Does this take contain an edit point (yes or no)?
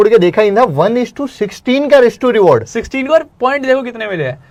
no